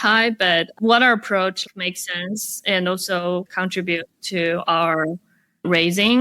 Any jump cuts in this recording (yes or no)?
yes